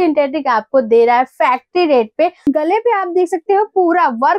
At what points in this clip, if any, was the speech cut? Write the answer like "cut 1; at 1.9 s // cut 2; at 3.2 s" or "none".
cut 1; at 2.5 s